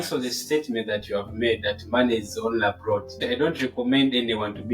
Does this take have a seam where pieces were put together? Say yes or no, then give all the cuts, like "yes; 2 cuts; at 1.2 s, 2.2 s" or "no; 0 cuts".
yes; 1 cut; at 3.1 s